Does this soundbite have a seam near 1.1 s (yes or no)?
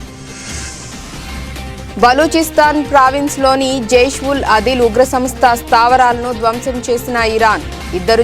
yes